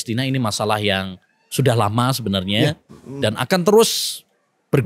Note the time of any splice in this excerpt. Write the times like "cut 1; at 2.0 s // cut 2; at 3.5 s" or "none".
none